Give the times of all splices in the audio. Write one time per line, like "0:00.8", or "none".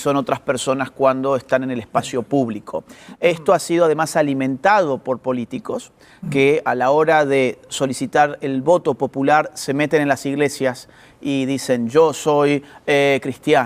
none